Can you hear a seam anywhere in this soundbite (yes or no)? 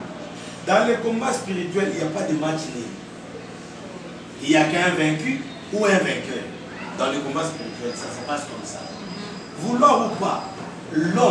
no